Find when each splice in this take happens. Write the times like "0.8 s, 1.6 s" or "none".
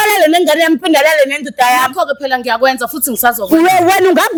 none